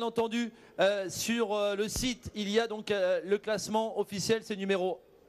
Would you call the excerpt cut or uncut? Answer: uncut